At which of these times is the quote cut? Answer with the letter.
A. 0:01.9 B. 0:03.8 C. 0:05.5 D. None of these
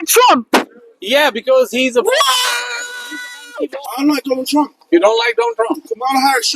B